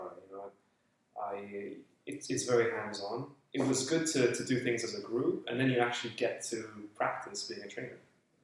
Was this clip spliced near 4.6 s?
no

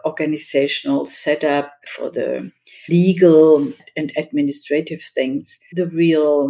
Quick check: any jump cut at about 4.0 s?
no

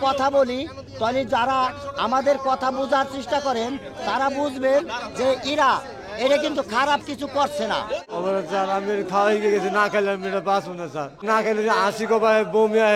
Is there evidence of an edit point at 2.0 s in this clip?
no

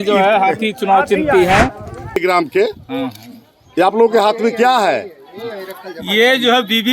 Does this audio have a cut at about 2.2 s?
yes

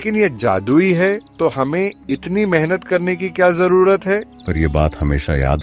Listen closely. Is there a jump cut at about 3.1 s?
no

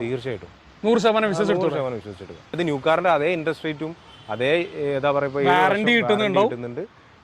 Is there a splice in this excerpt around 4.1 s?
no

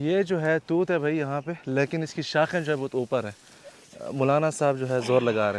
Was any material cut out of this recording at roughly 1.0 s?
no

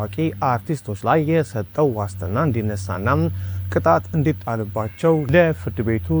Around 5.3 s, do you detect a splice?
yes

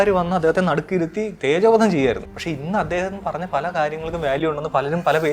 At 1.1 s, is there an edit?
no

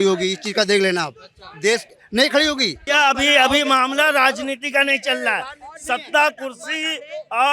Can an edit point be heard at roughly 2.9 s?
yes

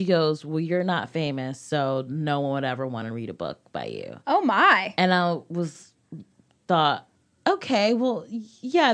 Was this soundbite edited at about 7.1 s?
yes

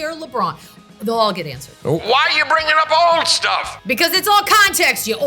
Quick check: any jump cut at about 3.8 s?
no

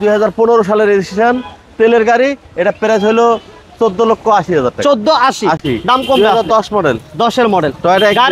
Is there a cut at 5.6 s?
no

